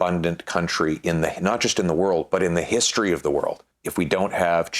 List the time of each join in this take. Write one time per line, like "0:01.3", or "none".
0:03.7

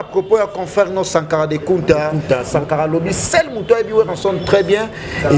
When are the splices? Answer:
0:02.2

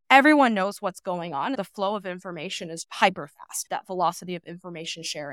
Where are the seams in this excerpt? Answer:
0:01.6

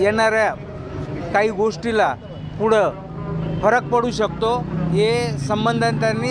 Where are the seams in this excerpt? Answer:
none

